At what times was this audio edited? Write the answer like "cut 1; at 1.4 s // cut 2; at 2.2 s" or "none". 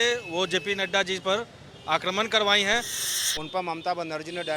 cut 1; at 3.0 s